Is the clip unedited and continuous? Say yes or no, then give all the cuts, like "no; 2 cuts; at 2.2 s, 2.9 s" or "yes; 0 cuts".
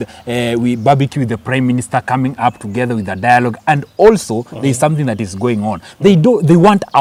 yes; 0 cuts